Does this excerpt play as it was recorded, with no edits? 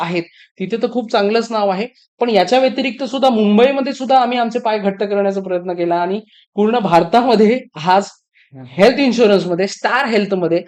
yes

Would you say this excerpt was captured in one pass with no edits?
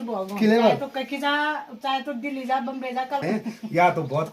no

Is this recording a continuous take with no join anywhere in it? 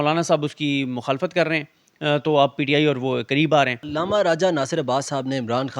no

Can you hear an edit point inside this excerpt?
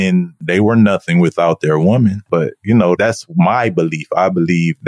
yes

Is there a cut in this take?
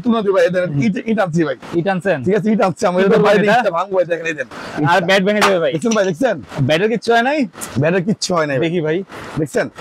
no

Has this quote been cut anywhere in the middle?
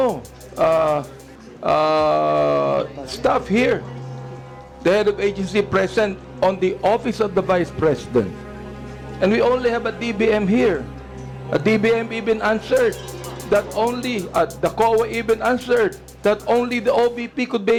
no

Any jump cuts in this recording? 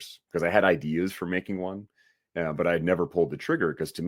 no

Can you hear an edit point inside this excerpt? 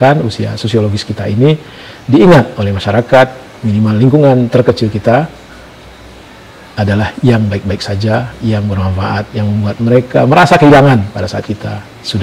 no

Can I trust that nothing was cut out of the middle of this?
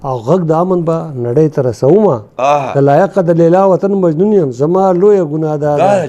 no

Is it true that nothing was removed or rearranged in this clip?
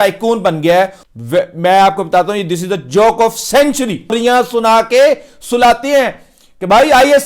no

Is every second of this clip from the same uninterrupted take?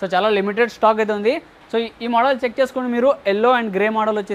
yes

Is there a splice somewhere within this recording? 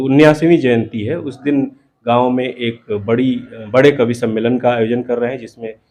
no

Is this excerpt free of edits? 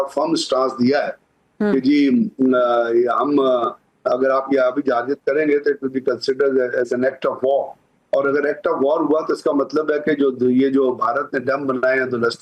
yes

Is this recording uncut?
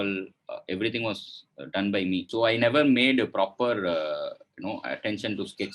no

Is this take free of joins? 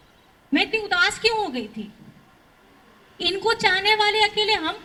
yes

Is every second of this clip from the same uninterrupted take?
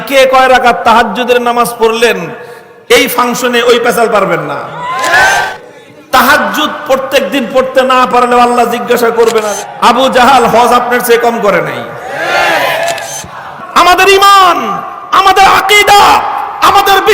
no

